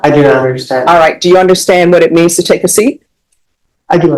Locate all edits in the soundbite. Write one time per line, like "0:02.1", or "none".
none